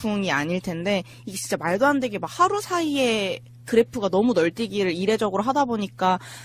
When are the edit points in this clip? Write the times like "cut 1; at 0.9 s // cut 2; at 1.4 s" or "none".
cut 1; at 1.1 s